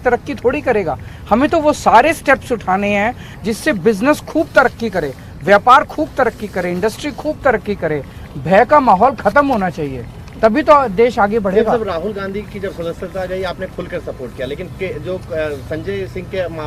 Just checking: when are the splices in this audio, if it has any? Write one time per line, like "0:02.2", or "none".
none